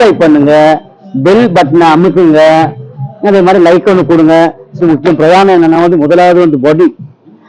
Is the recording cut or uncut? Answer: cut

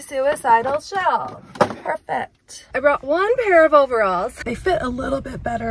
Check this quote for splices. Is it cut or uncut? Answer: cut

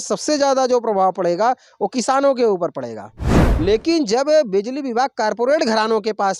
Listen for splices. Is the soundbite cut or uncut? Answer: cut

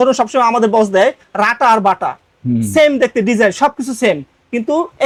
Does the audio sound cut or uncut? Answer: uncut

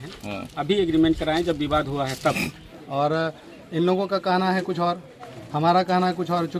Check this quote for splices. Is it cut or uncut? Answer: cut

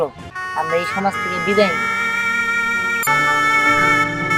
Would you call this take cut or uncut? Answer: cut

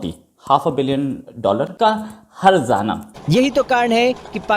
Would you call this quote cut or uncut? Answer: cut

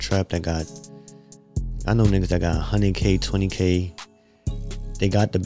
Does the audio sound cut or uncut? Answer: uncut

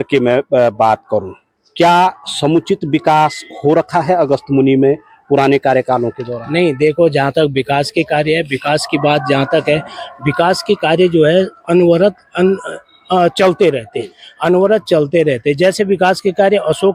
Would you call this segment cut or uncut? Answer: uncut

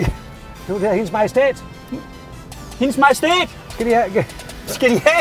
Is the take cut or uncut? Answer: uncut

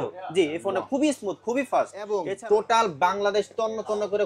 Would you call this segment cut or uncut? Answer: cut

